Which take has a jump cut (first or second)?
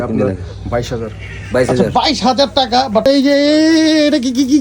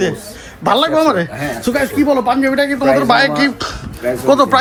first